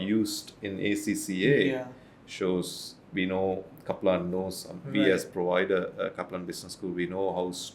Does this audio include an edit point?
no; 0 cuts

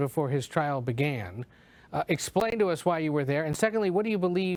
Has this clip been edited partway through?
no; 0 cuts

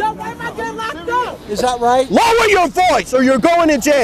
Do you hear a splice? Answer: yes; 1 cut; at 1.4 s

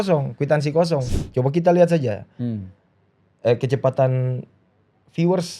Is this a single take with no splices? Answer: no; 1 cut; at 1.1 s

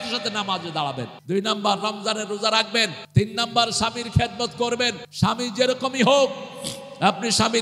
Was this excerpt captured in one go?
no; 3 cuts; at 1.2 s, 3.0 s, 5.0 s

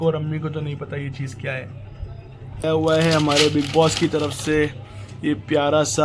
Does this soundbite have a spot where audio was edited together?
yes; 1 cut; at 2.6 s

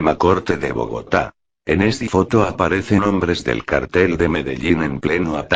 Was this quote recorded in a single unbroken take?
yes; 0 cuts

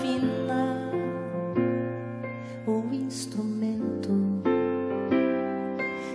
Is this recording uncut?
yes; 0 cuts

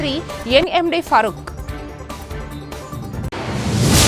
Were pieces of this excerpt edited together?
yes; 2 cuts; at 1.3 s, 3.3 s

